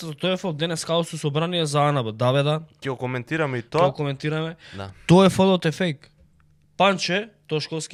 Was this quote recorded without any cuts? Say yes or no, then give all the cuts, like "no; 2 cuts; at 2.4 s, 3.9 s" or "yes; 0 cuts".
yes; 0 cuts